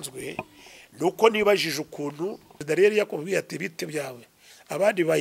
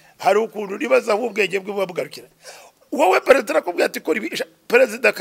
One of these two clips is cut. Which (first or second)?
first